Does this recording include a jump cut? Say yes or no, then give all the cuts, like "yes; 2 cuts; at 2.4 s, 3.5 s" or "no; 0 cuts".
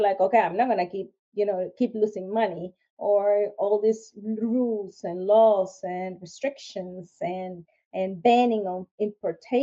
no; 0 cuts